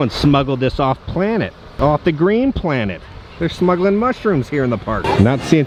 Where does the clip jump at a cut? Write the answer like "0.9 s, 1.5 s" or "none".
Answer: none

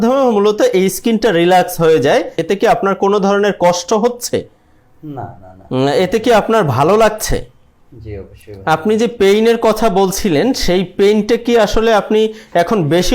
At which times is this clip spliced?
2.4 s

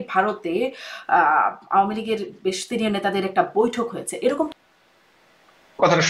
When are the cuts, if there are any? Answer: 4.5 s

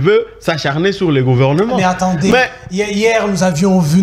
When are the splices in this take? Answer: none

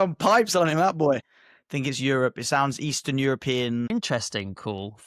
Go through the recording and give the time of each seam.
3.9 s

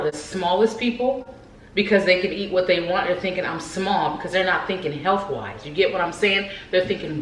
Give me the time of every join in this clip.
none

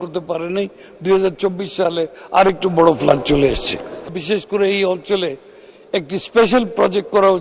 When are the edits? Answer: 4.2 s

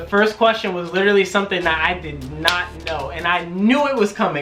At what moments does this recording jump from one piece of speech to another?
none

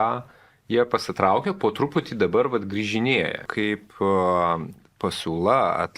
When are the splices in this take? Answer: 3.5 s

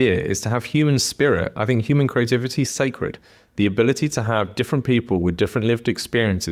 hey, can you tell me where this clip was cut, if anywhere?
none

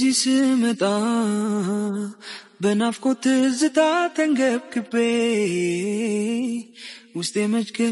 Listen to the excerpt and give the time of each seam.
none

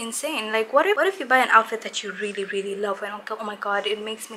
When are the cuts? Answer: 1.0 s

